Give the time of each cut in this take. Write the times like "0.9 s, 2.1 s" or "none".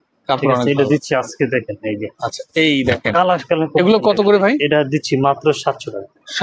none